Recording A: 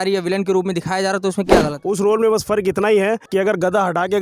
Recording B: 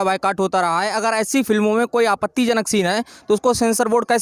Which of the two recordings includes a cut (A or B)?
A